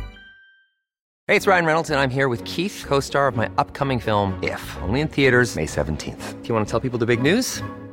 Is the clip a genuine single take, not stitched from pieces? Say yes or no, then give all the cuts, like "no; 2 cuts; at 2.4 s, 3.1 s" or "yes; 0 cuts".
no; 1 cut; at 1.1 s